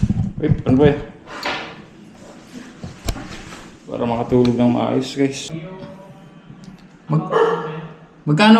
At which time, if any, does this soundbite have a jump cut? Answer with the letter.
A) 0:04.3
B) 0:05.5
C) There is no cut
B